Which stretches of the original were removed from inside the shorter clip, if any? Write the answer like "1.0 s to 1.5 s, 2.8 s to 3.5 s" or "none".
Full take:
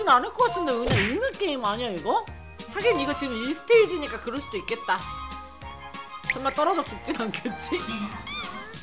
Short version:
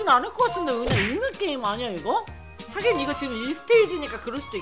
none